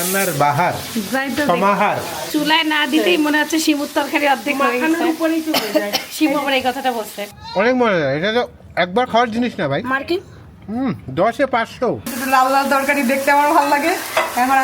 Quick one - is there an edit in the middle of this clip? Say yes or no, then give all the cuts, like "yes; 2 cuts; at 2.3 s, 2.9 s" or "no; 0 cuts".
yes; 3 cuts; at 2.2 s, 7.2 s, 12.1 s